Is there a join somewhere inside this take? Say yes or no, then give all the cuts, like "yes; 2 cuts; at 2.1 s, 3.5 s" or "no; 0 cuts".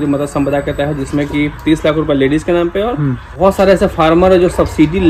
yes; 1 cut; at 3.3 s